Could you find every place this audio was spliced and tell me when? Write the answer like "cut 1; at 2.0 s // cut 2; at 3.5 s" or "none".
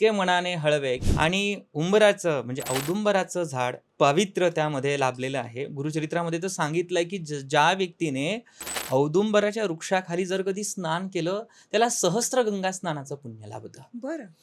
cut 1; at 1.0 s